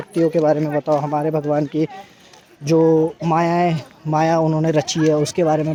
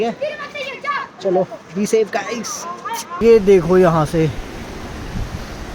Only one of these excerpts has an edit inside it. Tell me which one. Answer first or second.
second